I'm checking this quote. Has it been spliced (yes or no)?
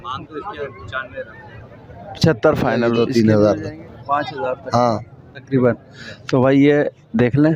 yes